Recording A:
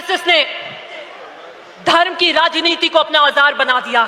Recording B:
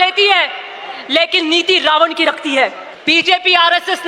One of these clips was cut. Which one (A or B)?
B